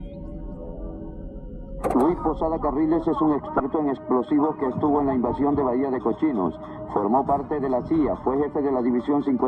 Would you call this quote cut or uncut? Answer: cut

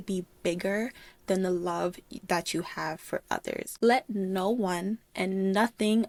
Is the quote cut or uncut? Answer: uncut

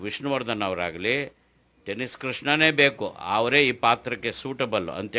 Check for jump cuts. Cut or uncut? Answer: uncut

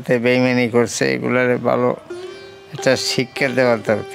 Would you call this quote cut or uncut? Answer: uncut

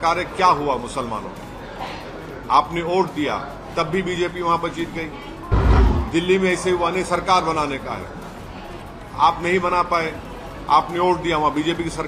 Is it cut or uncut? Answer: uncut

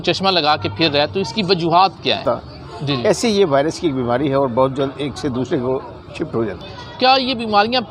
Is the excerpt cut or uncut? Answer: cut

